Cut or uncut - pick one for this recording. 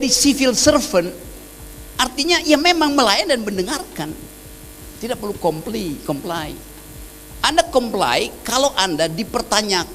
uncut